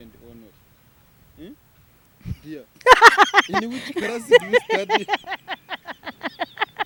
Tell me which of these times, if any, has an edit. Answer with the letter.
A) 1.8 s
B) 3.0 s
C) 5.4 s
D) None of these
D